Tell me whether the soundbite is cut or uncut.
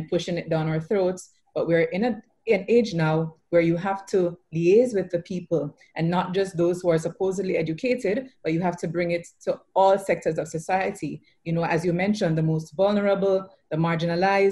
uncut